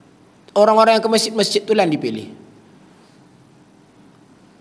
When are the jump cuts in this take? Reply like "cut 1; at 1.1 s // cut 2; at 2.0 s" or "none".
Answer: none